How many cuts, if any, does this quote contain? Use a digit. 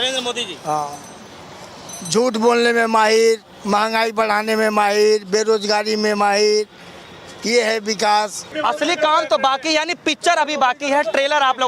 1